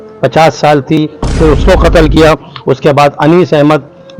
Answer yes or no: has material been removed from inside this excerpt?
yes